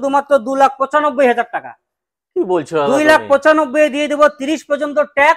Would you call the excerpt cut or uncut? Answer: uncut